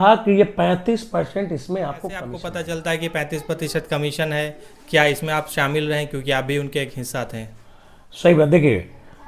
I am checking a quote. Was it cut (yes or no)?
yes